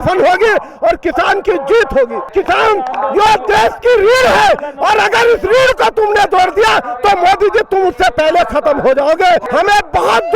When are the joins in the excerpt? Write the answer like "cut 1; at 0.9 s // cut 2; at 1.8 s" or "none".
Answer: cut 1; at 2.3 s // cut 2; at 9.5 s